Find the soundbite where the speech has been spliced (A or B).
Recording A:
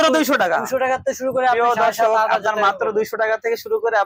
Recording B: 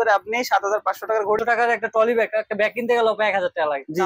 B